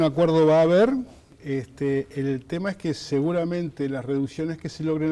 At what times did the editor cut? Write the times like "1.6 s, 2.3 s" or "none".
3.3 s

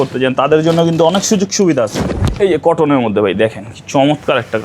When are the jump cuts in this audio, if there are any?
2.0 s

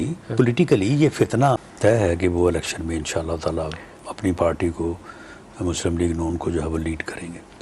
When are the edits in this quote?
1.7 s

